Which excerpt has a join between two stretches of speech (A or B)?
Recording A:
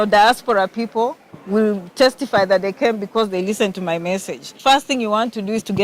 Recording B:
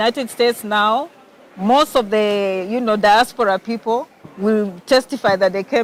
A